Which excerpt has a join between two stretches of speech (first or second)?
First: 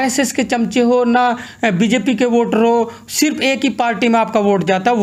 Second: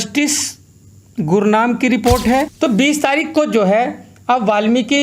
second